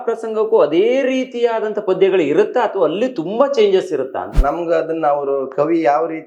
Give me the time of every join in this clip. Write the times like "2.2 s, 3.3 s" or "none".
4.4 s